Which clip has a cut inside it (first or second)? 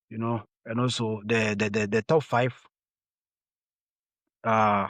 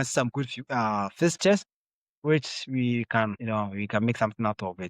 second